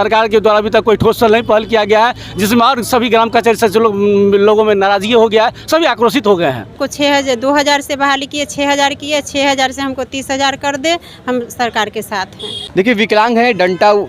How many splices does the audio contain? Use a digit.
2